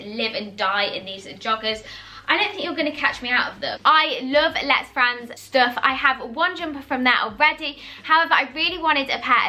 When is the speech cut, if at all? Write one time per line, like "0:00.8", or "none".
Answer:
none